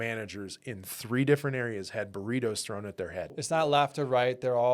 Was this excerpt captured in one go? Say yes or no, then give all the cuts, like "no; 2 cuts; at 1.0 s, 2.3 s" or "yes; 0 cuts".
no; 1 cut; at 3.5 s